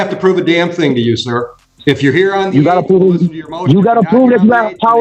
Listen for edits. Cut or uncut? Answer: uncut